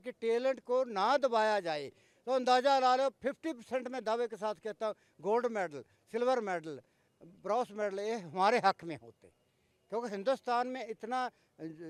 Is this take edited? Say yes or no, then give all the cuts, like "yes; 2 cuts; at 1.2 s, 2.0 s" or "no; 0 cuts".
no; 0 cuts